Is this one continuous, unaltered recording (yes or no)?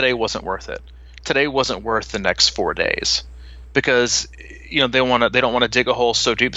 yes